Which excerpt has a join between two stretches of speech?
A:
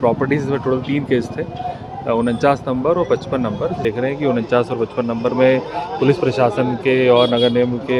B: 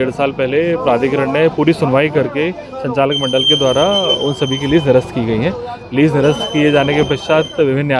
A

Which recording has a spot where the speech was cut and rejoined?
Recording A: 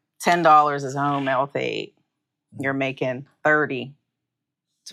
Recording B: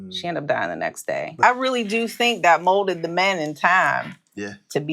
B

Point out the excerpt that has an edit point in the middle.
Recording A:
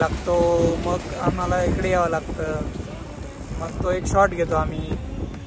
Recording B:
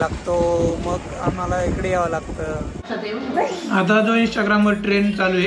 B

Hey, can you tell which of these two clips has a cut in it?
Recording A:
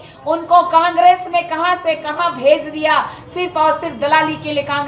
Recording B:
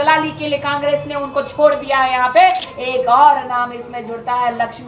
B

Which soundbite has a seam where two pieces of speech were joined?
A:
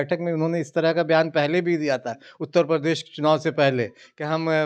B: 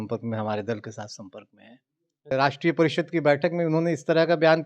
B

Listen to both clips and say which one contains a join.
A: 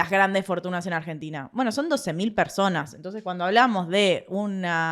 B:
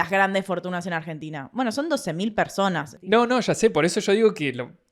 B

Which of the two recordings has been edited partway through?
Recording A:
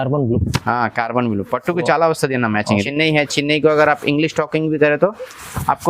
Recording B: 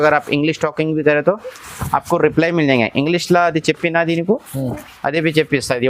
A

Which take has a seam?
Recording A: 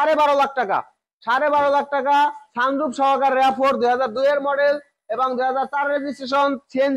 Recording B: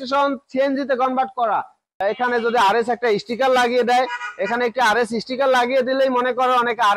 B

